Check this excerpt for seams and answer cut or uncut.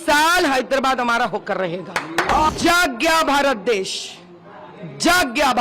cut